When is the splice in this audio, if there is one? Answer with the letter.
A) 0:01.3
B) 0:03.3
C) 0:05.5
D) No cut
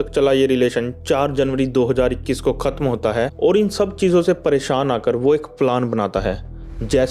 B